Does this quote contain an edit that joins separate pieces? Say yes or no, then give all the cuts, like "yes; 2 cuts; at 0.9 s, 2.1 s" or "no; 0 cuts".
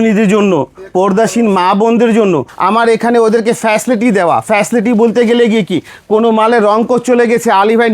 yes; 1 cut; at 2.5 s